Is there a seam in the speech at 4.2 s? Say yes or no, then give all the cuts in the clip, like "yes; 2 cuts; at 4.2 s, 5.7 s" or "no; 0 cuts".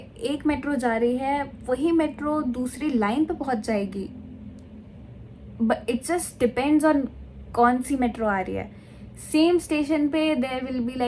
no; 0 cuts